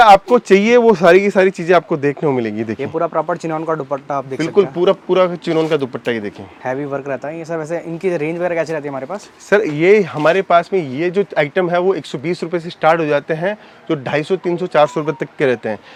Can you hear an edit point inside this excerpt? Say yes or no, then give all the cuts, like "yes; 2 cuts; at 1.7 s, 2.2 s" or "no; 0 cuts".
no; 0 cuts